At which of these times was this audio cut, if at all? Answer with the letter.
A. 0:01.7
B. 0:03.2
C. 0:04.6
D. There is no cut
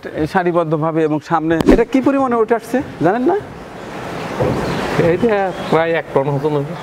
A